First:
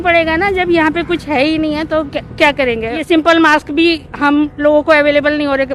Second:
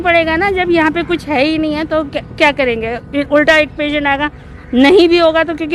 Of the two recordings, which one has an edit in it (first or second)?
first